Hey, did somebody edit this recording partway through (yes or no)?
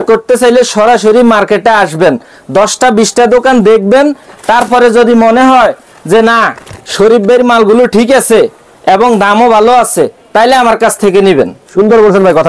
no